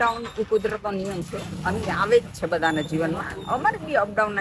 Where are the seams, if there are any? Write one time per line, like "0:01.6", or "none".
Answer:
none